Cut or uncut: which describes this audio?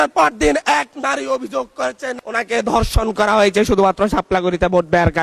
uncut